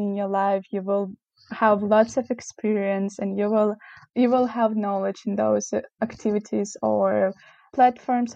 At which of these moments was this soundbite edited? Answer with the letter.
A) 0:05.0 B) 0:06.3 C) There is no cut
C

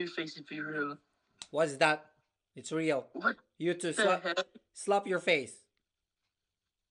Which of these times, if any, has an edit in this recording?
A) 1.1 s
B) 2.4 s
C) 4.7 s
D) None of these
D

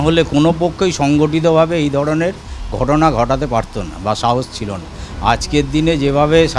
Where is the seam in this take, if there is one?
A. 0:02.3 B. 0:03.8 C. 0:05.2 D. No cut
D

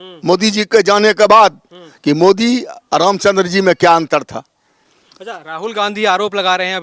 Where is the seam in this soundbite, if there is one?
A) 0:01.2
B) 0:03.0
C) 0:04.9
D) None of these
D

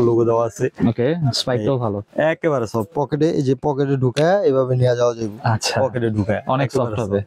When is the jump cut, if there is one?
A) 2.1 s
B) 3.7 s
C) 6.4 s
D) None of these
D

